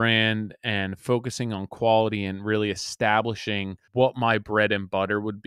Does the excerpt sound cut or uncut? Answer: cut